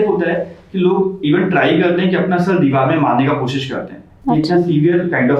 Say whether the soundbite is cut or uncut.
uncut